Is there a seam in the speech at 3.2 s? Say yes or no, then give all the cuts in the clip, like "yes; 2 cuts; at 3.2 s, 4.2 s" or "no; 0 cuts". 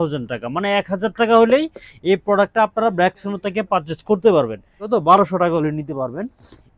no; 1 cut; at 4.8 s